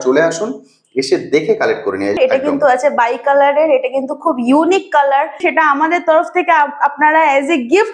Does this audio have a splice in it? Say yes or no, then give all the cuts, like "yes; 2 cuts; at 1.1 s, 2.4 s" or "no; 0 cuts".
yes; 2 cuts; at 2.1 s, 5.4 s